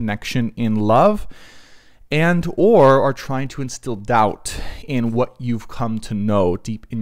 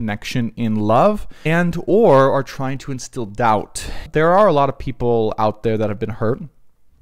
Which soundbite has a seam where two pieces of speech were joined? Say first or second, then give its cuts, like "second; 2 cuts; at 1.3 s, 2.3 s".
second; 2 cuts; at 1.3 s, 4.0 s